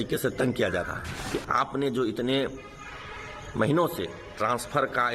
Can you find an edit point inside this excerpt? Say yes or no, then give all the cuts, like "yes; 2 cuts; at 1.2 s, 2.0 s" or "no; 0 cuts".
yes; 1 cut; at 1.1 s